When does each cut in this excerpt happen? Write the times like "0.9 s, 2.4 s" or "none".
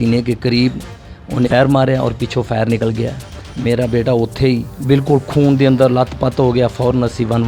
1.5 s